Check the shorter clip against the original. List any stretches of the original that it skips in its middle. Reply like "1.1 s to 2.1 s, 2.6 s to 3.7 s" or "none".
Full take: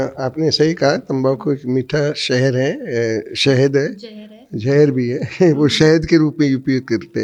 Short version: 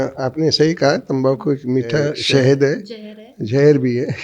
2.2 s to 3.3 s